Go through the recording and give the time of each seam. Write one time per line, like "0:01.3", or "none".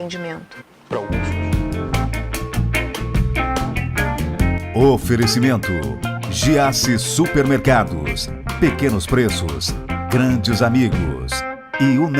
0:01.1